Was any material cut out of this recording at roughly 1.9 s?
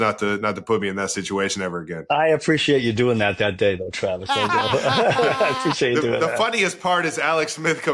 yes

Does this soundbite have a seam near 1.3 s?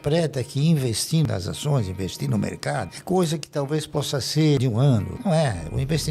yes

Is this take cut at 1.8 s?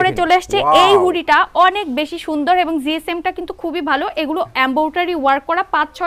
no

